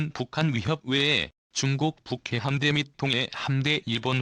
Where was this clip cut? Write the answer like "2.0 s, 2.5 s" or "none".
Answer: 1.4 s